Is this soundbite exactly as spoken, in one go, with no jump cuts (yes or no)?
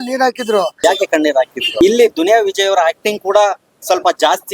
no